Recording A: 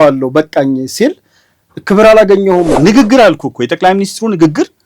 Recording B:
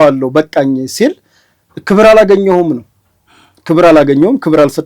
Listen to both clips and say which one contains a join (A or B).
A